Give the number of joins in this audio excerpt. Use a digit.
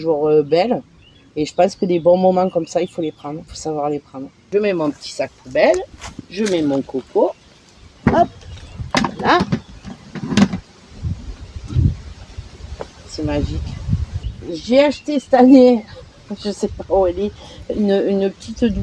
2